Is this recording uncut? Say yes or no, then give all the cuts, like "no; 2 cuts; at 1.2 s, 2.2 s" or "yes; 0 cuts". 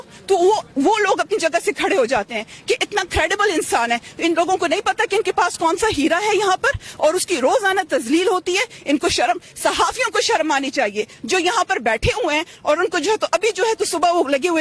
yes; 0 cuts